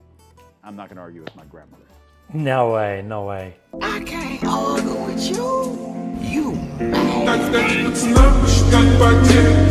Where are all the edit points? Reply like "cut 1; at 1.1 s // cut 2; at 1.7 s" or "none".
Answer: none